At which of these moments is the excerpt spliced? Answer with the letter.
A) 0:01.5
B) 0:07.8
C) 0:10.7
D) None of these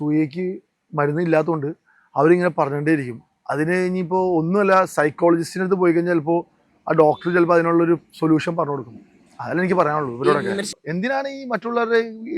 C